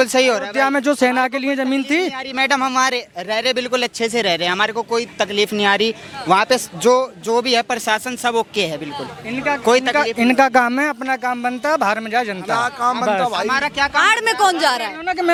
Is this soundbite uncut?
yes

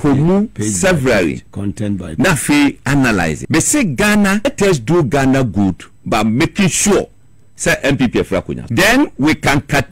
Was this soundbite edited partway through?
yes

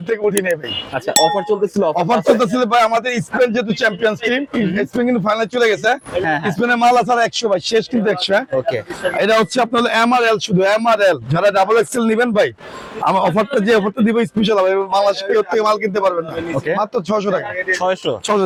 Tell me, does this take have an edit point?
no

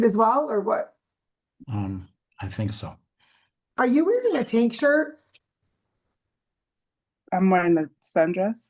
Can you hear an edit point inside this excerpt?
yes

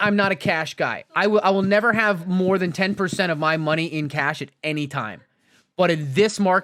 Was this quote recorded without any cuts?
yes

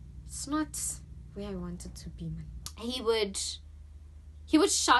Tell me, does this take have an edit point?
yes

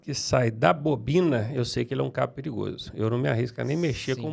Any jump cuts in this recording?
no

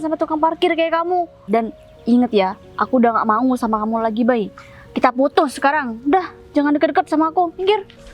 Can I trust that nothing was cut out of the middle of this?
no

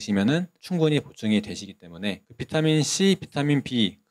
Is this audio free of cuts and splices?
no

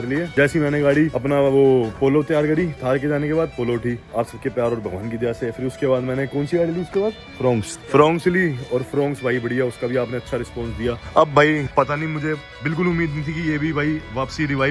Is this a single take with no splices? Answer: yes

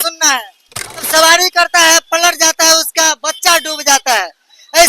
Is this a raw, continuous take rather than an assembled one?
no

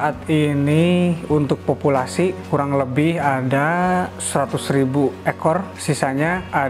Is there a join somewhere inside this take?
no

